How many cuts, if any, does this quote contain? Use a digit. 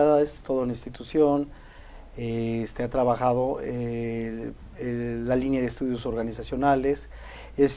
1